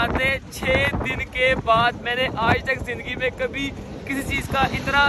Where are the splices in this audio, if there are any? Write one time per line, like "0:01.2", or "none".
none